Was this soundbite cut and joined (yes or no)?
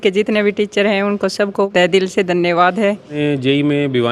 yes